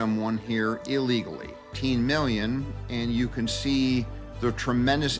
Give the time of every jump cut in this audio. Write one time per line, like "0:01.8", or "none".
0:01.7